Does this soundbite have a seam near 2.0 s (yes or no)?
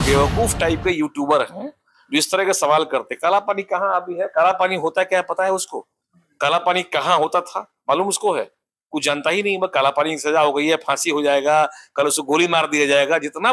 no